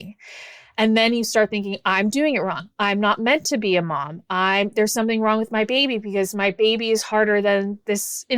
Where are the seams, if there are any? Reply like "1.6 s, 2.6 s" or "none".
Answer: none

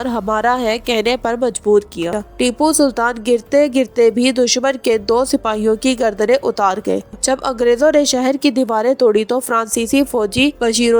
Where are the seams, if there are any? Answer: 2.2 s, 7.1 s

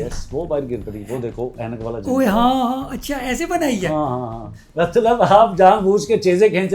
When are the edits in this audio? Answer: 4.6 s

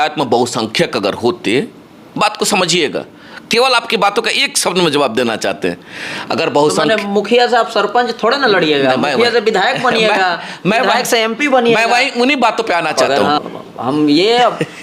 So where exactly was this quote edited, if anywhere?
13.4 s

